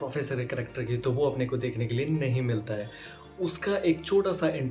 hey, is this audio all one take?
yes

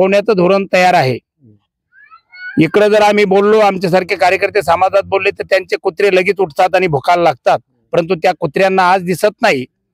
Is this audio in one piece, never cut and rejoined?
yes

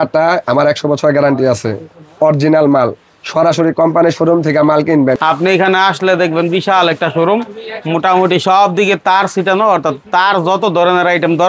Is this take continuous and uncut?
no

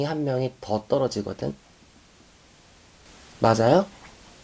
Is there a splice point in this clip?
yes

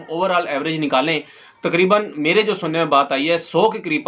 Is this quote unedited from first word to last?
yes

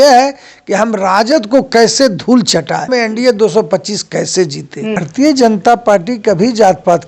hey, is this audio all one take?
no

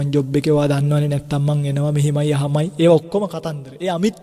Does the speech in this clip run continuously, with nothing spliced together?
yes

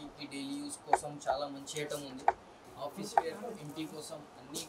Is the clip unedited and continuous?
no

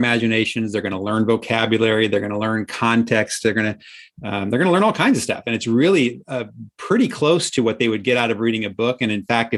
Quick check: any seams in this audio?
no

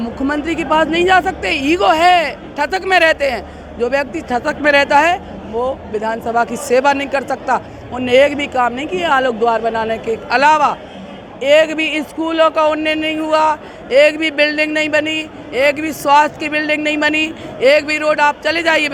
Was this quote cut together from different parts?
no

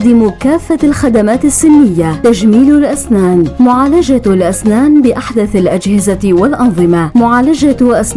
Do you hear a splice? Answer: no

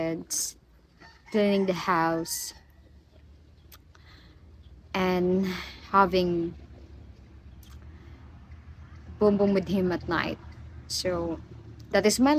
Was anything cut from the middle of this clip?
no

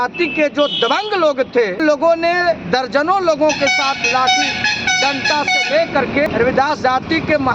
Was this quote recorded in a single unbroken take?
no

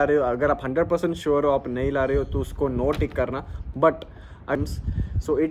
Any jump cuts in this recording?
yes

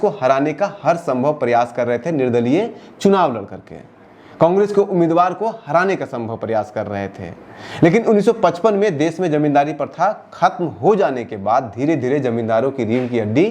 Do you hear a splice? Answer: no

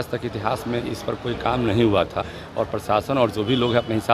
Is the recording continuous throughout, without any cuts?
no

